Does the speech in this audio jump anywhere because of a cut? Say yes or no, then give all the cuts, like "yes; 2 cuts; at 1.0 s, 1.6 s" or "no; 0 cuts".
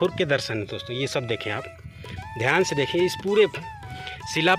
no; 0 cuts